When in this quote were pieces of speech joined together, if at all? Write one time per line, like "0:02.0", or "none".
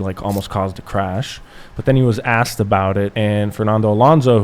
0:03.1

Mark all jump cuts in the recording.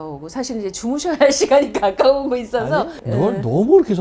0:03.0

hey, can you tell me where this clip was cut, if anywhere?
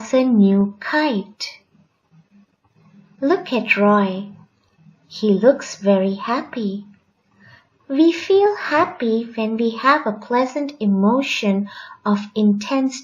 0:06.5

